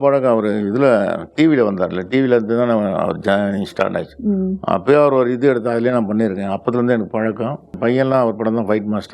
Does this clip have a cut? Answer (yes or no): yes